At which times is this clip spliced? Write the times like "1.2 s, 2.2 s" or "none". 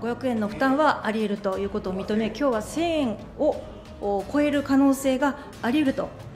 none